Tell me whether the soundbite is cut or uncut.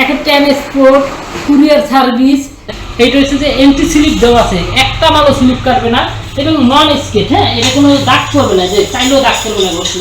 cut